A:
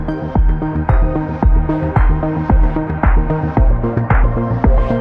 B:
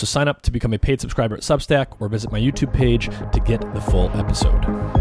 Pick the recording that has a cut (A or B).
B